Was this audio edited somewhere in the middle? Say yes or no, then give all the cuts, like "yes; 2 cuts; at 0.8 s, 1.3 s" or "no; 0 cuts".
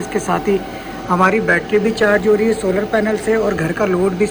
no; 0 cuts